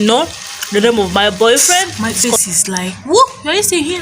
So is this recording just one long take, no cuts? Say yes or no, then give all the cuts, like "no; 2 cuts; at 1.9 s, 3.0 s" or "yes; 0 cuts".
no; 1 cut; at 1.9 s